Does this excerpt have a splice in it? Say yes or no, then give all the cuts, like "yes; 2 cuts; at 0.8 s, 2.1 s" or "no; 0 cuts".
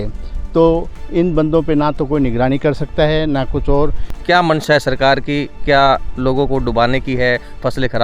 yes; 1 cut; at 4.1 s